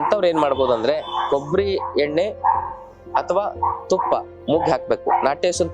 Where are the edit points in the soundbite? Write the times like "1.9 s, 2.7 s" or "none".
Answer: 1.1 s